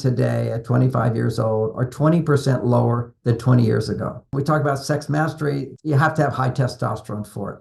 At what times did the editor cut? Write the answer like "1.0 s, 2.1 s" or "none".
4.3 s, 5.7 s